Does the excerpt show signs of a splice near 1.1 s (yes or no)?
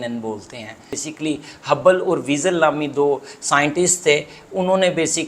yes